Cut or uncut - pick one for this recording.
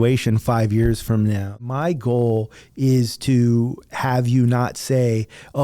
cut